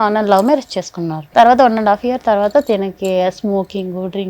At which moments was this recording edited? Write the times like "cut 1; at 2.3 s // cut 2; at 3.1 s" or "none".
cut 1; at 1.2 s